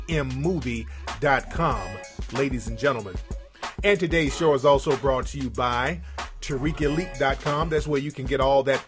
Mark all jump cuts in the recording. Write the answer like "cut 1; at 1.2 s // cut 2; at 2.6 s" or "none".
cut 1; at 6.9 s